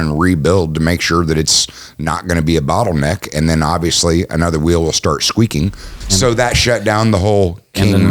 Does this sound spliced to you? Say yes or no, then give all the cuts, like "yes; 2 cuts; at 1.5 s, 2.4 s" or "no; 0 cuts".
yes; 1 cut; at 6.0 s